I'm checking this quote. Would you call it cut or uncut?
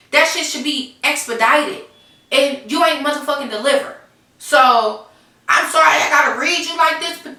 uncut